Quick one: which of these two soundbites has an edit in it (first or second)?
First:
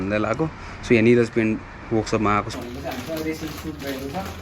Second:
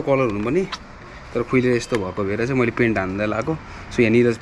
first